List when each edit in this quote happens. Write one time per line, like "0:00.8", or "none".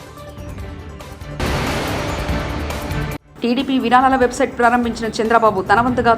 0:01.4
0:03.2